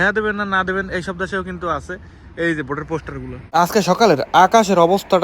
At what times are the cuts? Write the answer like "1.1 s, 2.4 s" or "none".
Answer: 3.4 s